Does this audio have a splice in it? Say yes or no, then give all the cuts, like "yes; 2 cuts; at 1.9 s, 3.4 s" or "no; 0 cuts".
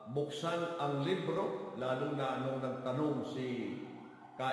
yes; 1 cut; at 1.7 s